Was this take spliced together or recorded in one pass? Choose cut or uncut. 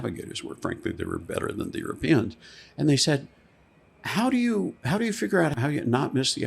cut